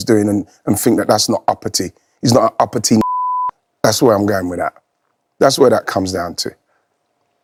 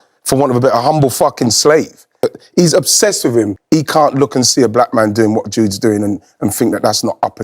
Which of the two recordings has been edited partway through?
second; 2 cuts; at 2.4 s, 3.6 s

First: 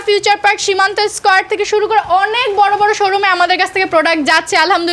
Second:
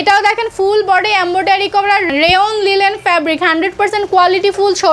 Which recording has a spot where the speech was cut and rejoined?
second; 1 cut; at 2.1 s

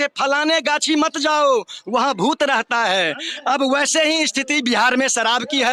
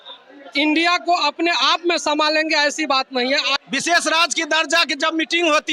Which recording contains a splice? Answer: second; 1 cut; at 3.5 s

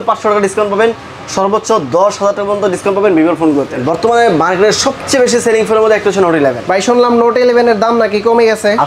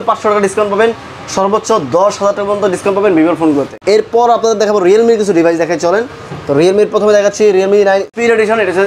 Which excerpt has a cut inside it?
first; 1 cut; at 3.8 s

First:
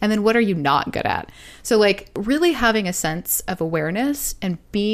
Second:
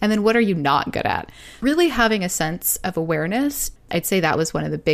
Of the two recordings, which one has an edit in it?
second; 2 cuts; at 1.5 s, 3.8 s

